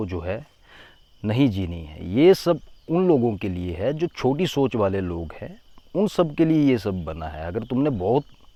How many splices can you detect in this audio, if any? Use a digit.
0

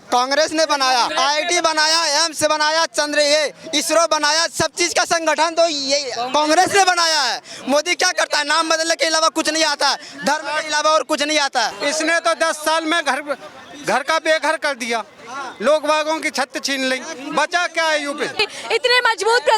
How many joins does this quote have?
3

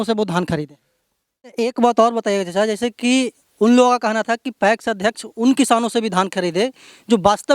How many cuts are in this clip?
1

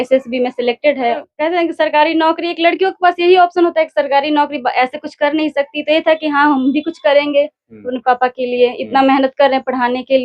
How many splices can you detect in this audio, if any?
1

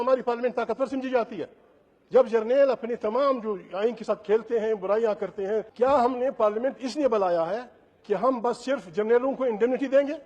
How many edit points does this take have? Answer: 1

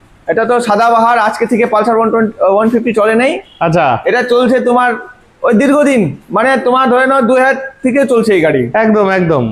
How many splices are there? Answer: 0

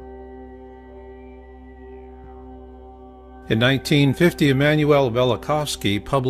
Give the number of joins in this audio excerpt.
1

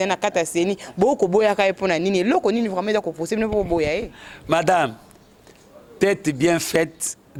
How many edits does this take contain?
0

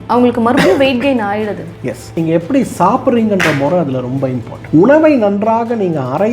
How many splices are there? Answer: 2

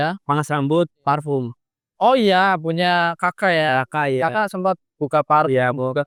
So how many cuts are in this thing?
0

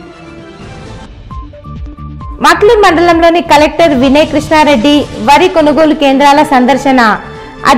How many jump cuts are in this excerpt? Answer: 1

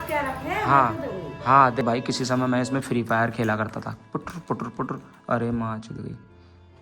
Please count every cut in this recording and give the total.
1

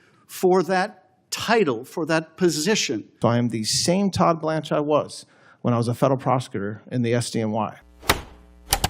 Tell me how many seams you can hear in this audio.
2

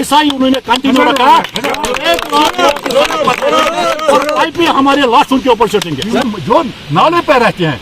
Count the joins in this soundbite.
1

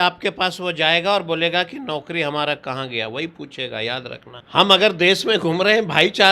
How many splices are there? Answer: 1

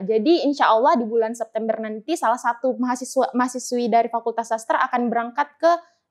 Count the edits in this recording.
0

